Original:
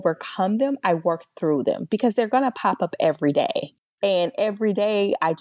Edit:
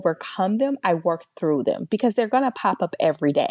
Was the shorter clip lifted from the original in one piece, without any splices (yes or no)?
yes